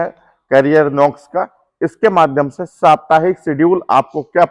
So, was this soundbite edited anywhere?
no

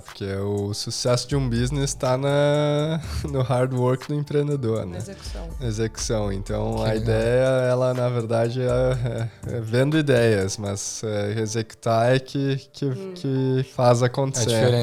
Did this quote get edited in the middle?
no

